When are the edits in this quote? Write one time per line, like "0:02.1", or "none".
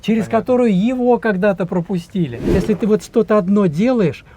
0:02.6